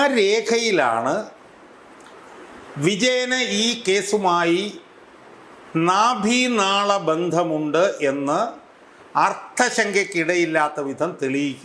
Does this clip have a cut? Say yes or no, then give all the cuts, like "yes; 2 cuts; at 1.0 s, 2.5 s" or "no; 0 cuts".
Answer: no; 0 cuts